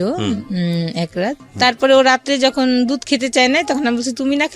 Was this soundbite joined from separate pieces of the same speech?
yes; 1 cut; at 1.5 s

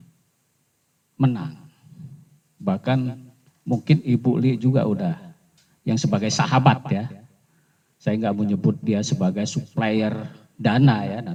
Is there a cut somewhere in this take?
no; 0 cuts

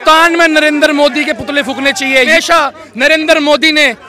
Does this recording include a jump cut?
yes; 1 cut; at 2.3 s

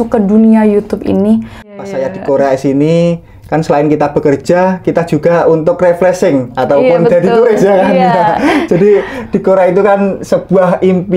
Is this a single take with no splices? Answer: no; 1 cut; at 1.7 s

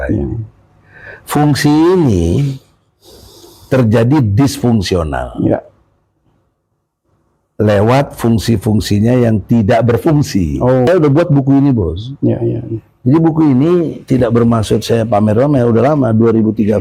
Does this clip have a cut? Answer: yes; 1 cut; at 10.9 s

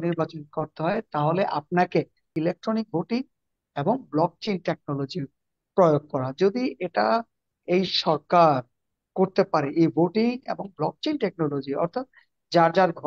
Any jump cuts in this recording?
yes; 1 cut; at 2.3 s

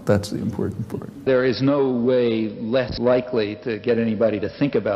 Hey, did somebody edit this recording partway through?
yes; 2 cuts; at 1.2 s, 2.9 s

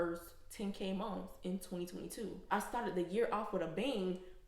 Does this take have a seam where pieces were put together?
yes; 1 cut; at 2.5 s

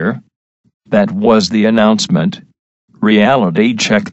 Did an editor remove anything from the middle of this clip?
yes; 1 cut; at 2.8 s

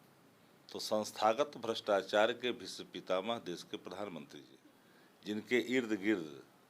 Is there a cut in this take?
yes; 1 cut; at 4.5 s

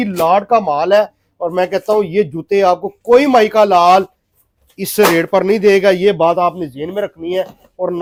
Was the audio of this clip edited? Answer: no; 0 cuts

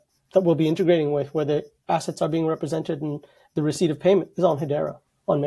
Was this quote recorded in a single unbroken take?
yes; 0 cuts

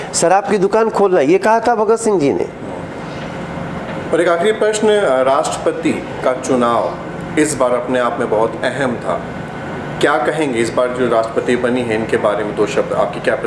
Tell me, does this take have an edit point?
no; 0 cuts

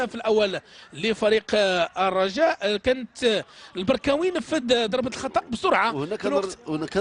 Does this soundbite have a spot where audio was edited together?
yes; 1 cut; at 5.8 s

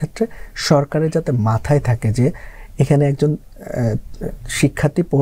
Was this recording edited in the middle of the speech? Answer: no; 0 cuts

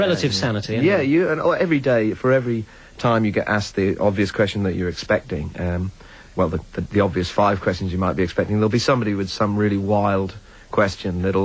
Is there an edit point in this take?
yes; 1 cut; at 2.9 s

